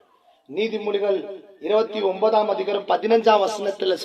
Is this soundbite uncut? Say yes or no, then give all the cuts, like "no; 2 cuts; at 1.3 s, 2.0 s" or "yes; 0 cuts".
yes; 0 cuts